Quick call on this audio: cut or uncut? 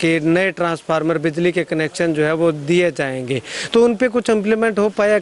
uncut